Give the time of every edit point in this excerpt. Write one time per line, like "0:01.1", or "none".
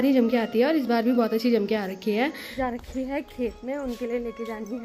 0:02.4

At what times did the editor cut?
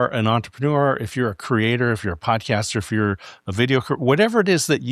none

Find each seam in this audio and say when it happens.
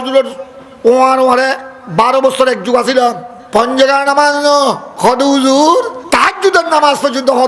0:03.3
0:04.9
0:06.0

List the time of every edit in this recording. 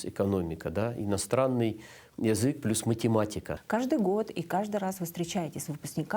0:03.5

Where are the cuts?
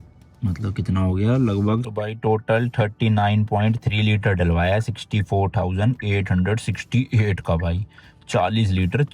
0:01.9

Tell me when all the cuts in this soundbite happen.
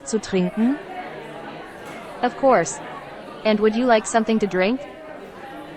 0:00.8
0:02.2
0:04.8

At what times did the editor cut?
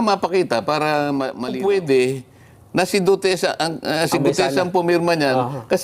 0:01.5

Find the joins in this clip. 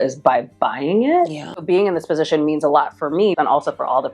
0:01.6
0:03.4

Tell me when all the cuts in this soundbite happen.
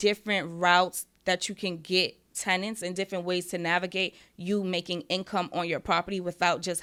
none

